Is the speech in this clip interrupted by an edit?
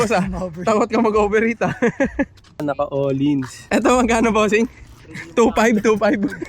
yes; 1 cut; at 2.5 s

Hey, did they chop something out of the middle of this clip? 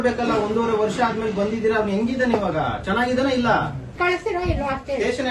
yes; 1 cut; at 3.9 s

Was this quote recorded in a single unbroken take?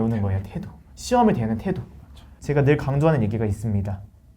no; 1 cut; at 2.3 s

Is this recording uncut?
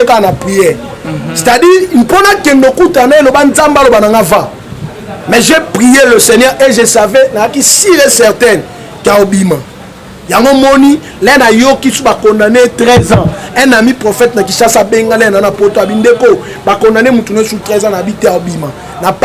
yes; 0 cuts

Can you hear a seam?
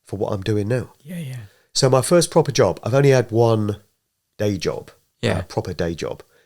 no; 0 cuts

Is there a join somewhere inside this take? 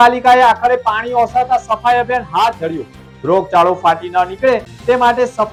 no; 0 cuts

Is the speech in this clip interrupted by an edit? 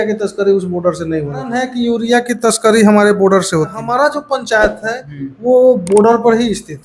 yes; 2 cuts; at 1.6 s, 3.8 s

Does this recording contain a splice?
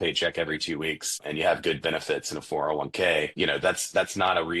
yes; 2 cuts; at 1.2 s, 3.3 s

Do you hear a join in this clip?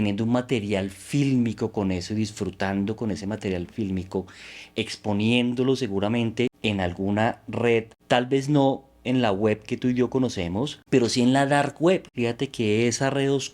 yes; 4 cuts; at 6.6 s, 7.9 s, 10.8 s, 12.1 s

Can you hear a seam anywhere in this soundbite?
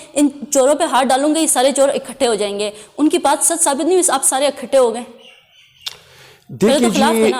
no; 0 cuts

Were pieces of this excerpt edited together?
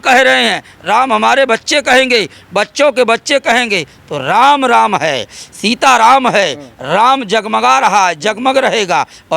no; 0 cuts

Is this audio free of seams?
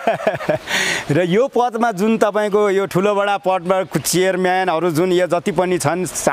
yes; 0 cuts

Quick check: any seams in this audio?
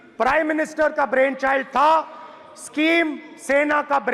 no; 0 cuts

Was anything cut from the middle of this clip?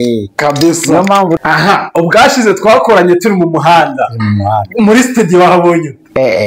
yes; 1 cut; at 1.4 s

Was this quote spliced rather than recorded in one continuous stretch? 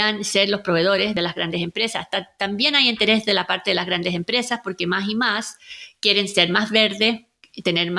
yes; 1 cut; at 1.1 s

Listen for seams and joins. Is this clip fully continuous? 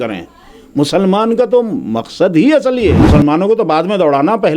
no; 1 cut; at 3.0 s

